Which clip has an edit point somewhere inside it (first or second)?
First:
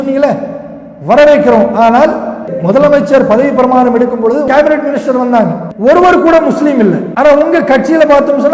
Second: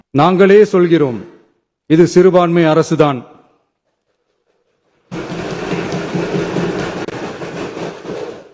first